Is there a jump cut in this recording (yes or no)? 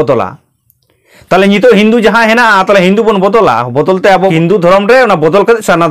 yes